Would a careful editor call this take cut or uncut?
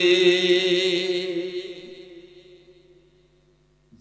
uncut